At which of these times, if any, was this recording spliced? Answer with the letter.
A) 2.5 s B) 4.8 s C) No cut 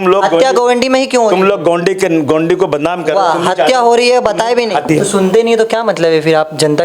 B